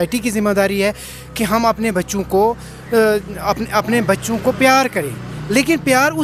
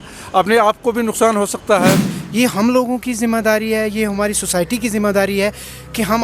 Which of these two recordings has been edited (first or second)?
second